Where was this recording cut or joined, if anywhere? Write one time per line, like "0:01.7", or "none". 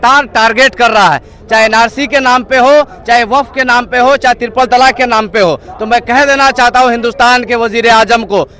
none